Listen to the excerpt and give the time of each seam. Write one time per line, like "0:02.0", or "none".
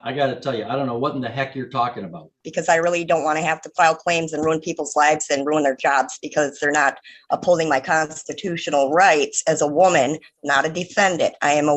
0:02.5